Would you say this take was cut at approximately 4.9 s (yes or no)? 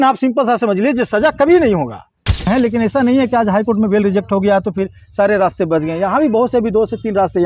no